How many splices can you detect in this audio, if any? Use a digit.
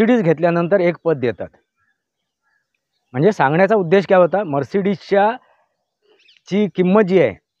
0